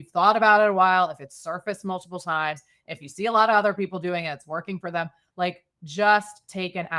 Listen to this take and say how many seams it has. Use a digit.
1